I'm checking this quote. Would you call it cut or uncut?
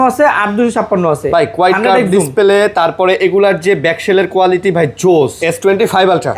cut